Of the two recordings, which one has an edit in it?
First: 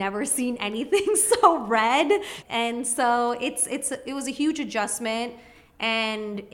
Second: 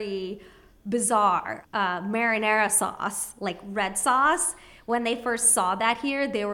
first; 1 cut; at 2.3 s

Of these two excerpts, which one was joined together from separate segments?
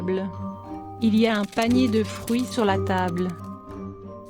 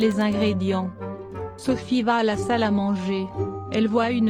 first; 1 cut; at 3.4 s

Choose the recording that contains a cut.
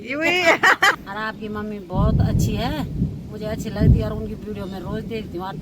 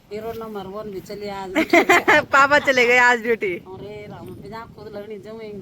first; 1 cut; at 1.0 s

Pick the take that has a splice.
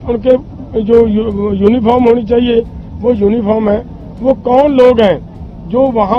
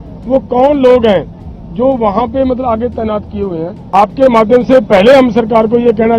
second; 1 cut; at 3.7 s

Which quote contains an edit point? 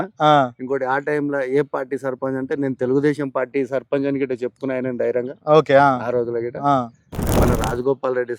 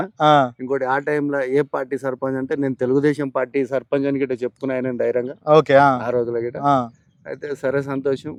first; 1 cut; at 7.3 s

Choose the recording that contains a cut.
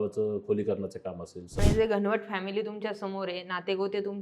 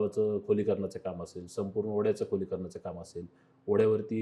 first; 1 cut; at 1.6 s

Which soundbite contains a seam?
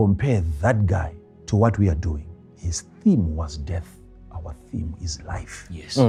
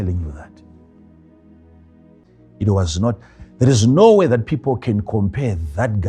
second; 1 cut; at 2.2 s

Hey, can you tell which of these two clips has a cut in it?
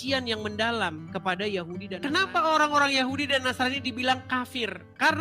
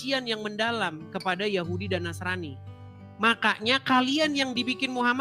first; 1 cut; at 1.8 s

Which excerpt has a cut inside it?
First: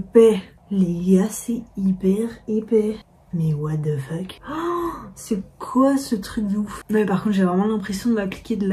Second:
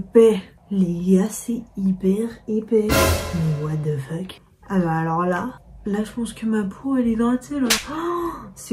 first; 1 cut; at 4.4 s

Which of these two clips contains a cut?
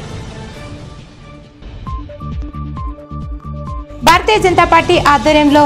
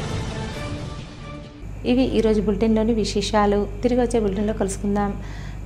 first; 2 cuts; at 1.7 s, 3.5 s

